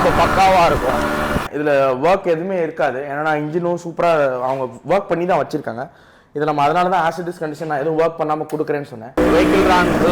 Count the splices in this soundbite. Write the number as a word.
two